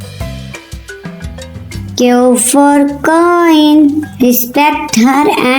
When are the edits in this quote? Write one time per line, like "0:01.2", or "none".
0:01.7